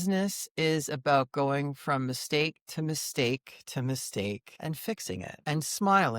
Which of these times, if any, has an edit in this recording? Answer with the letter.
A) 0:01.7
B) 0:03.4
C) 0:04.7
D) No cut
C